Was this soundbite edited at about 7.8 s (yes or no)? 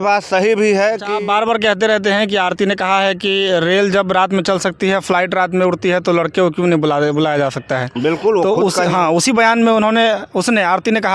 no